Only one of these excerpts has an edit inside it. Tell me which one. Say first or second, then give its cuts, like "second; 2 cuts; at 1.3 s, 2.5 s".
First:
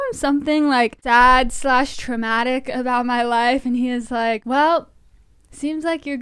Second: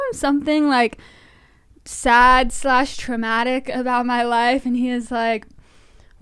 first; 2 cuts; at 1.0 s, 4.4 s